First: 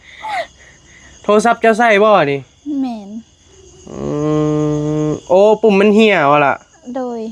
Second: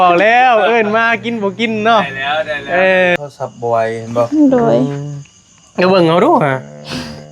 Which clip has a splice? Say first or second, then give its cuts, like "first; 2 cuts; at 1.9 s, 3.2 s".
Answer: second; 1 cut; at 3.2 s